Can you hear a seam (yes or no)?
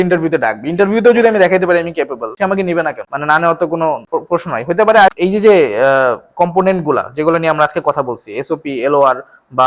yes